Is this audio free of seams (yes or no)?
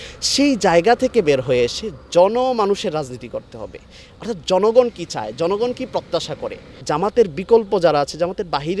no